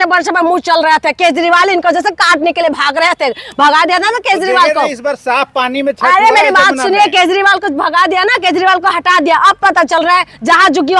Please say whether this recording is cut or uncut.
uncut